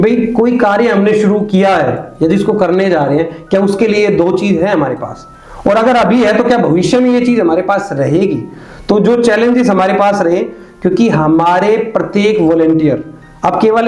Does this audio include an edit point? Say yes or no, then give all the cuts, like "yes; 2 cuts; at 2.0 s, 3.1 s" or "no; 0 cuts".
no; 0 cuts